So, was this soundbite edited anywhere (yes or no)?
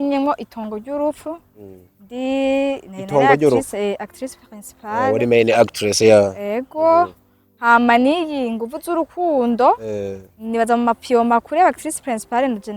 no